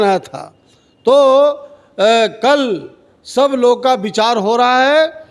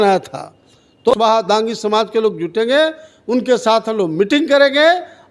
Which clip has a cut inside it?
second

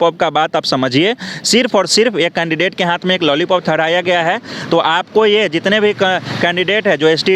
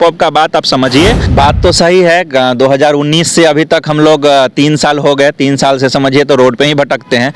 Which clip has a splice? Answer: second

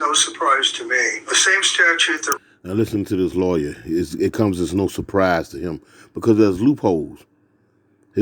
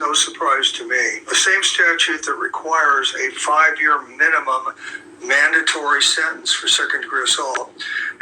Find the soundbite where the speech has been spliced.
second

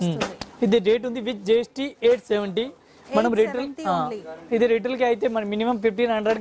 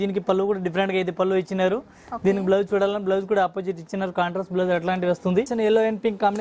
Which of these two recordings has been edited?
second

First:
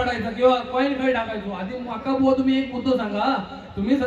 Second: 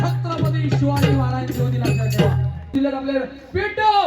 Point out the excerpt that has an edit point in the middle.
second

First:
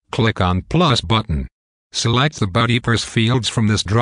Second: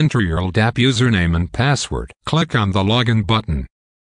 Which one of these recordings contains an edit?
first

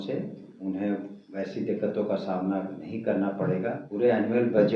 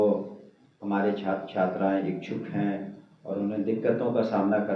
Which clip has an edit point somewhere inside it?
first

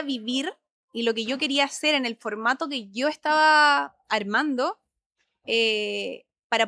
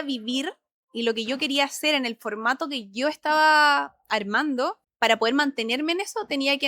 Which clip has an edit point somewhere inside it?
second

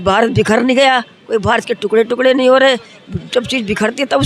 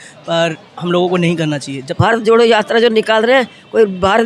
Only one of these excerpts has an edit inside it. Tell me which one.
second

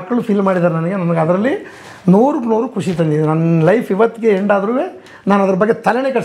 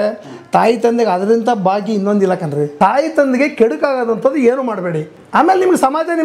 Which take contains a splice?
second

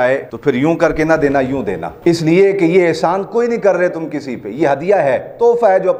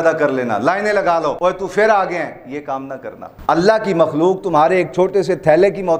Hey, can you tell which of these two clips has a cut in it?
second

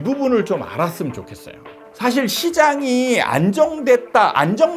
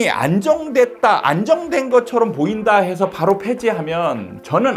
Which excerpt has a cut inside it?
first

